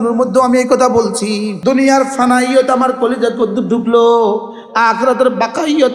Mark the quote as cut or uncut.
cut